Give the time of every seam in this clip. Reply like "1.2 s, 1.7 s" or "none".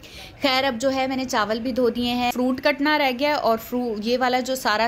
2.3 s